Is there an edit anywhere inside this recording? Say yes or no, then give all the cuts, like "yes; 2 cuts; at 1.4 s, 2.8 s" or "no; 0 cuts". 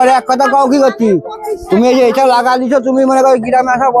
no; 0 cuts